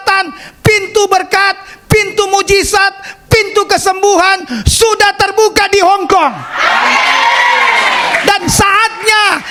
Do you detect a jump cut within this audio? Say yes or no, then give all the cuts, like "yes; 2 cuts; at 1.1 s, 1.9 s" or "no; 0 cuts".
no; 0 cuts